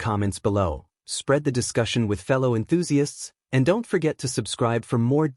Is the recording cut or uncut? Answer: uncut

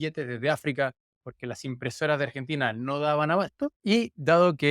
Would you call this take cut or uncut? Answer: cut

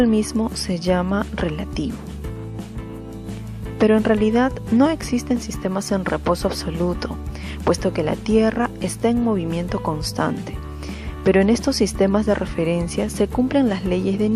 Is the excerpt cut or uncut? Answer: uncut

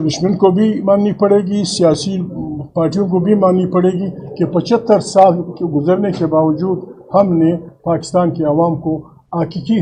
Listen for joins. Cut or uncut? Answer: uncut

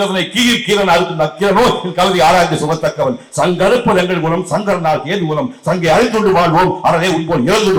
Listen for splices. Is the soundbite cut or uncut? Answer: uncut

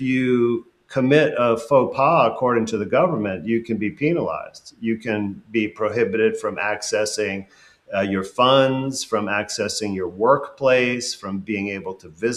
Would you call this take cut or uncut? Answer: uncut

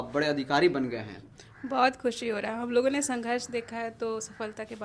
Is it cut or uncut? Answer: uncut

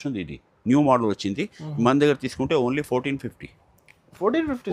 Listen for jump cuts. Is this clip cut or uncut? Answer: uncut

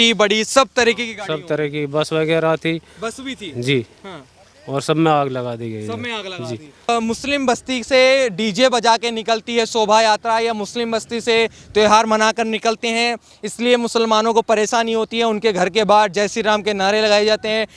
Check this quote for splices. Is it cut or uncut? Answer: cut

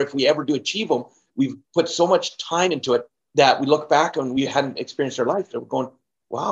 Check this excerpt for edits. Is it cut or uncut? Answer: cut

